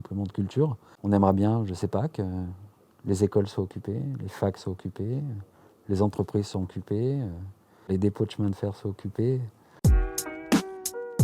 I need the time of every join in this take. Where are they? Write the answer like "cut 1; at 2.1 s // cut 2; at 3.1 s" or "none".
cut 1; at 9.6 s